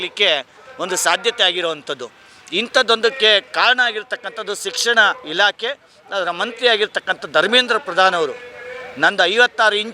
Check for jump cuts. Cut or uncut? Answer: uncut